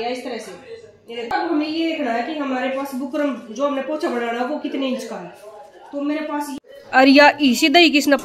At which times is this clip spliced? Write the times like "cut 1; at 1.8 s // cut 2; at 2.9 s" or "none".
cut 1; at 1.3 s // cut 2; at 6.5 s